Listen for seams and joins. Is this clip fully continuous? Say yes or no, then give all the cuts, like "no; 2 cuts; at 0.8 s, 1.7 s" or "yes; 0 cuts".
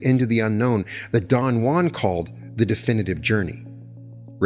yes; 0 cuts